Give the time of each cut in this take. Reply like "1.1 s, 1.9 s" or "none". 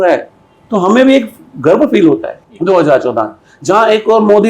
2.3 s